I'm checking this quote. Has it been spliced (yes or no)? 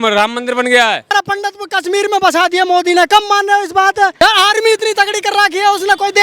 yes